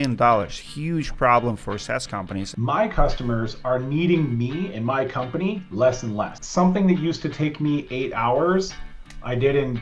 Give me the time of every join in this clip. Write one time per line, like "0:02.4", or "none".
0:02.5
0:06.4